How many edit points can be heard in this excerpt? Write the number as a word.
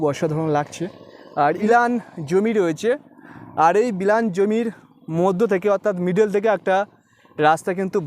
one